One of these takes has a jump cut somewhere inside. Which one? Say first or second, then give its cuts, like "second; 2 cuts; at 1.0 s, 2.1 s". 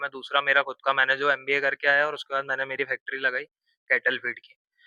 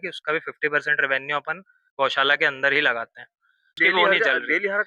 second; 1 cut; at 3.8 s